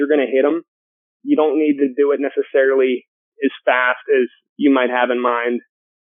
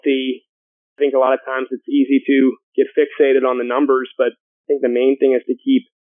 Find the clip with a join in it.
second; 3 cuts; at 0.8 s, 2.6 s, 4.5 s

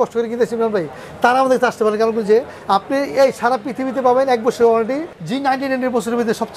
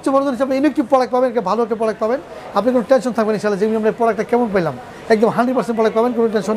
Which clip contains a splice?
first; 1 cut; at 5.1 s

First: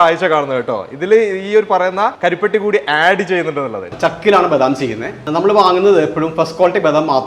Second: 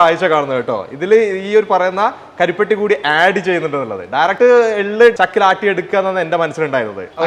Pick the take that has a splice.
first; 3 cuts; at 2.2 s, 3.9 s, 5.2 s

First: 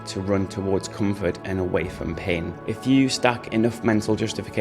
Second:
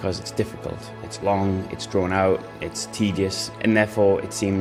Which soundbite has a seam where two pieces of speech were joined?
first; 1 cut; at 2.6 s

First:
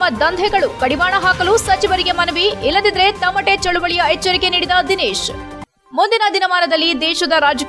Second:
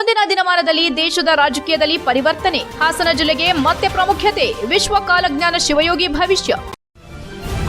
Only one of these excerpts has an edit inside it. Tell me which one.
second; 1 cut; at 6.7 s

